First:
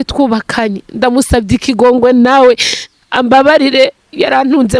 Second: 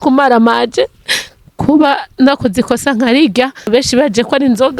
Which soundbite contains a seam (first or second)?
second